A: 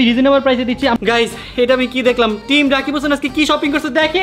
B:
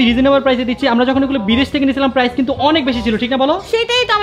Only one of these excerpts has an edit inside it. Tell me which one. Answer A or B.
A